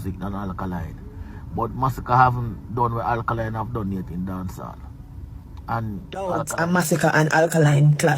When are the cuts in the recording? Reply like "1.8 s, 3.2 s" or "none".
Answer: 6.4 s